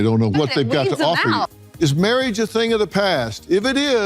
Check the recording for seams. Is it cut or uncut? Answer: cut